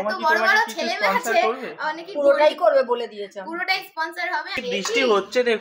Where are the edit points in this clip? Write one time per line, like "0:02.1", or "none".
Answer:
0:04.5